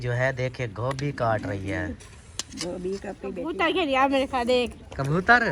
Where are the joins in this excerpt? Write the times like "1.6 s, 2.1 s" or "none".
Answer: 3.5 s